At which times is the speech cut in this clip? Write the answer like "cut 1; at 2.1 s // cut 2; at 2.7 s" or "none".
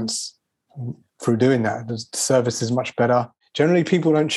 cut 1; at 3.4 s